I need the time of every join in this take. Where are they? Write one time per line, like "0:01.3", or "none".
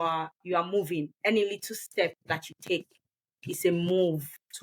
none

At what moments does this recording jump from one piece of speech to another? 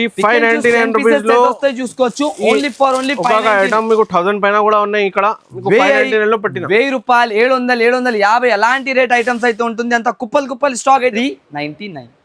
0:11.1

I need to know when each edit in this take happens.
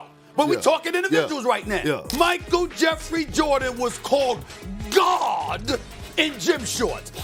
none

